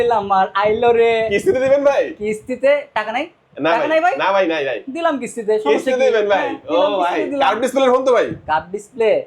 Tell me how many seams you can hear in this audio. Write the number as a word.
zero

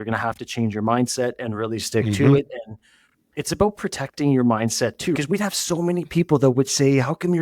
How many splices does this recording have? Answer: zero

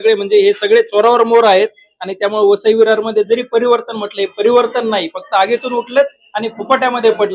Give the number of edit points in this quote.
zero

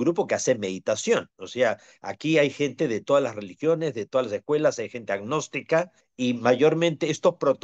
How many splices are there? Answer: one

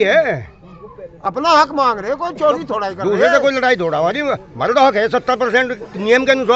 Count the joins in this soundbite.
zero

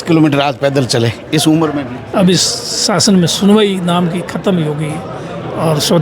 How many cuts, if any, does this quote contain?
one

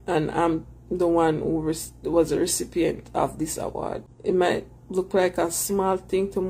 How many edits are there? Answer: one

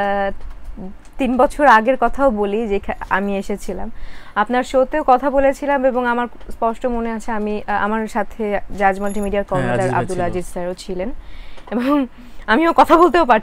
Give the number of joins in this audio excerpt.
zero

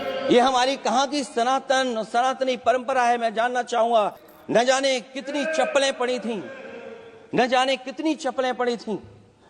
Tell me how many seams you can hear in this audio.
one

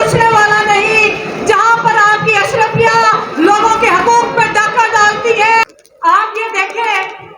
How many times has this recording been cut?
one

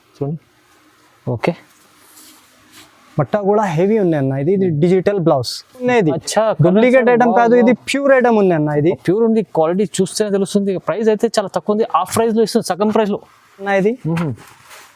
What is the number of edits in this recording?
two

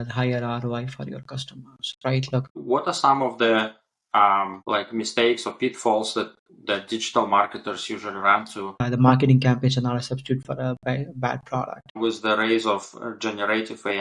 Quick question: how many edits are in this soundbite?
four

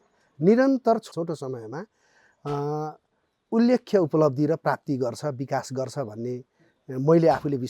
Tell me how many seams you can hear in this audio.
one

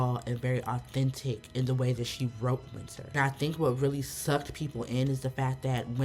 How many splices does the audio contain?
one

